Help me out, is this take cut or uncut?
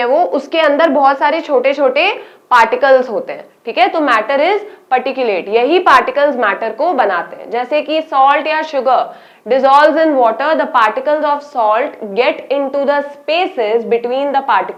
uncut